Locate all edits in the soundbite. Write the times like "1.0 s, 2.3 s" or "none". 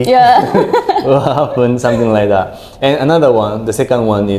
none